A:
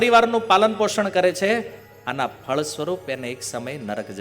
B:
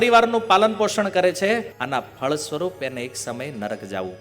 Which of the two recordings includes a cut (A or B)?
B